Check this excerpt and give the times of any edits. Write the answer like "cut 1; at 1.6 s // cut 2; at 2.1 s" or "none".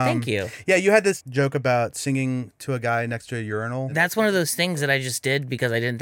cut 1; at 1.2 s // cut 2; at 3.9 s